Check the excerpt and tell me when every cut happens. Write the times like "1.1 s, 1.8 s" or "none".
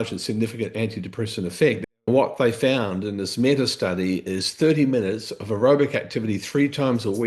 1.8 s